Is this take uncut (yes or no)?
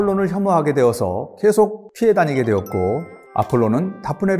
no